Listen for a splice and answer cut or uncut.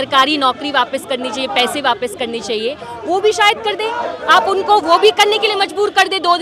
uncut